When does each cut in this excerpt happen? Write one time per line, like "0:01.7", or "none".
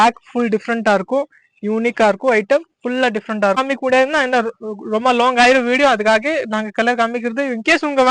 0:03.6